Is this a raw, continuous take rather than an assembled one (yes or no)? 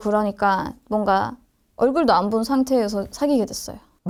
yes